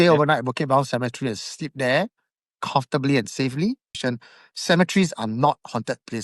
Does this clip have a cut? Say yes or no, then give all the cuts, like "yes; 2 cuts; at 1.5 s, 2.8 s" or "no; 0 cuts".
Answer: yes; 1 cut; at 3.9 s